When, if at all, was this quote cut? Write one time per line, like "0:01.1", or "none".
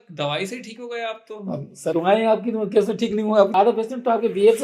0:03.5